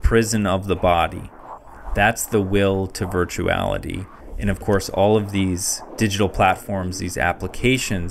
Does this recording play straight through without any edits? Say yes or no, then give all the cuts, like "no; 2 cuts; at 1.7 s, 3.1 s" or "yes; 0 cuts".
no; 1 cut; at 5.8 s